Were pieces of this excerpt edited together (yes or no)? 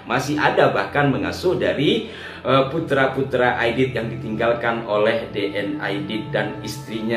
no